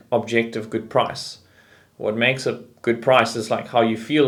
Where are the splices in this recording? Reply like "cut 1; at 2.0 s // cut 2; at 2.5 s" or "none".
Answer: none